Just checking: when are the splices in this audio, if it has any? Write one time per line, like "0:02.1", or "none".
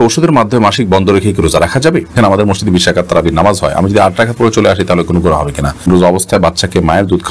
0:02.2
0:05.9